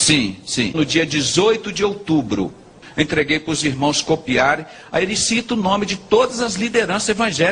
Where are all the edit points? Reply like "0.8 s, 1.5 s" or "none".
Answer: 2.8 s